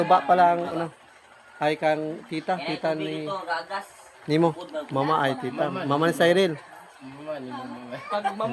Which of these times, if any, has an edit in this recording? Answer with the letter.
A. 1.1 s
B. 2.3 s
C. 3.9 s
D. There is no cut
D